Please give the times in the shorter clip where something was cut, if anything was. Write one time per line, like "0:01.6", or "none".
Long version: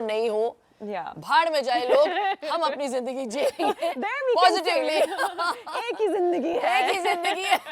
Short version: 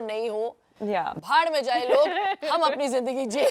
none